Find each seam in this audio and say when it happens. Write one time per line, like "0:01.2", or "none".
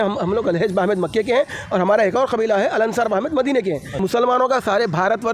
0:04.0